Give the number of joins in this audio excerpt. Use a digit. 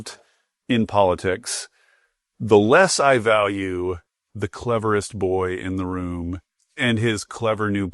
1